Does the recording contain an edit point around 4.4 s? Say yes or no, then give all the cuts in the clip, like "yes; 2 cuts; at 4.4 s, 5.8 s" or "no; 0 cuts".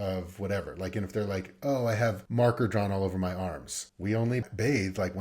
yes; 2 cuts; at 2.2 s, 4.4 s